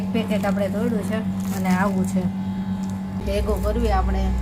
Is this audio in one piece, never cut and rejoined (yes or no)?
no